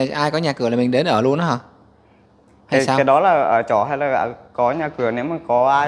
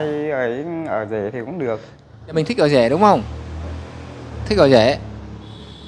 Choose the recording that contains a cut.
second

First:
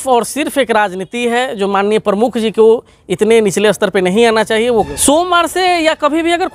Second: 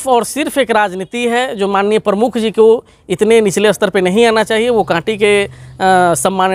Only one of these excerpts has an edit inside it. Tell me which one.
first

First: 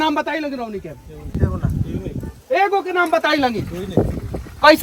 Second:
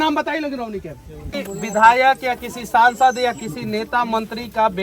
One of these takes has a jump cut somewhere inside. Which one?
second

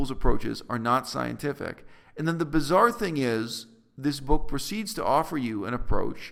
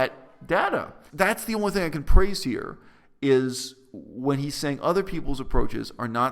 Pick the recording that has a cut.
second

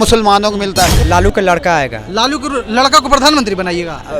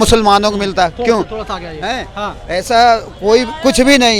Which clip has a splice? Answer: first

